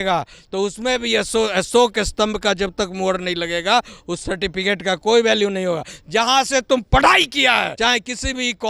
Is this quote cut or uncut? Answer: cut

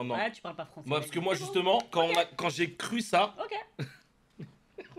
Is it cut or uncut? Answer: uncut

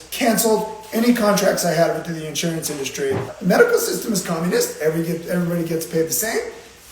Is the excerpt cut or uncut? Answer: cut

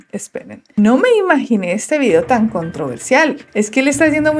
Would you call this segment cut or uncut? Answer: uncut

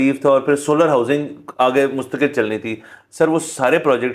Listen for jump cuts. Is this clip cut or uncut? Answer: uncut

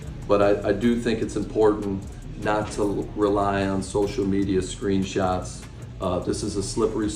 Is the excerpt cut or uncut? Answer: uncut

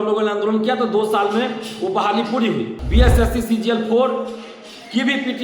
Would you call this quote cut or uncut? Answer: cut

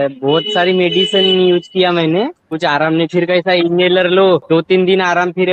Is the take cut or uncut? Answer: cut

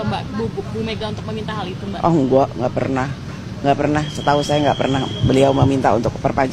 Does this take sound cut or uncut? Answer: uncut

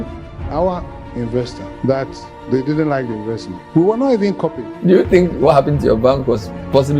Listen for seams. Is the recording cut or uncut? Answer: cut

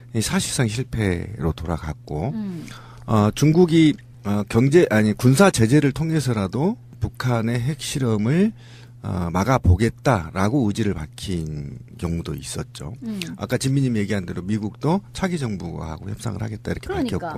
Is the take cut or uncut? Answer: uncut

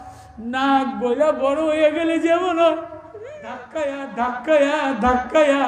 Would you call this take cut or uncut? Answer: cut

